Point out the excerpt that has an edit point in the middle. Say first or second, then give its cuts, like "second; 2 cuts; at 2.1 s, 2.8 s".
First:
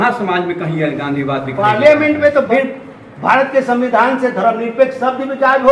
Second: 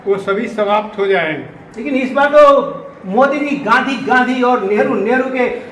first; 1 cut; at 2.5 s